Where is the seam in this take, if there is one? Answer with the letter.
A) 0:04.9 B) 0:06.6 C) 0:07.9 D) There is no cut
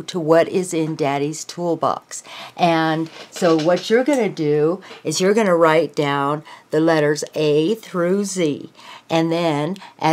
D